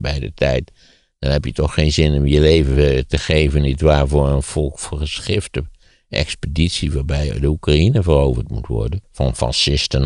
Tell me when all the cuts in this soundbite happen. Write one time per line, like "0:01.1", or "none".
0:09.0